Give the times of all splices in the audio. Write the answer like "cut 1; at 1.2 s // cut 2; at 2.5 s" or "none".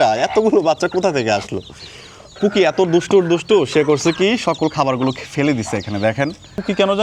none